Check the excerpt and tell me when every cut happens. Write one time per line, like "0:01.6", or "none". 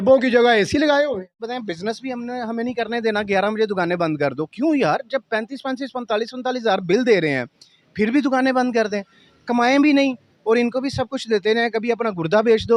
0:01.4